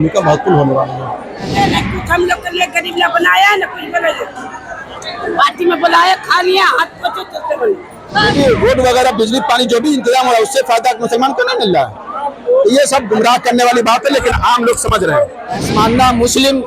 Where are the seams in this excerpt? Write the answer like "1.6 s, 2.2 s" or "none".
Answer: 1.5 s, 8.3 s, 15.7 s